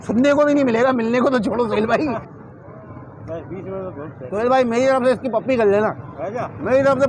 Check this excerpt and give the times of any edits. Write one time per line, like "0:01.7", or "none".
0:02.4